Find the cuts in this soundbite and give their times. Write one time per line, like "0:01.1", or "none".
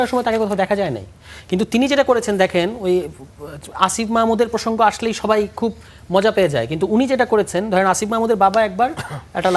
none